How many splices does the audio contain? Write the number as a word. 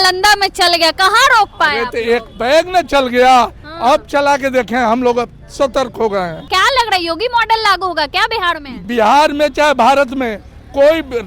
two